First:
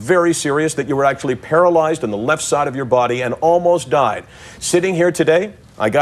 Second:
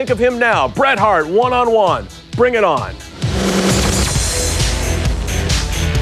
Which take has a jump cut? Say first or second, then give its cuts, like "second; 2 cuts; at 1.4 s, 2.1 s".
first; 1 cut; at 4.6 s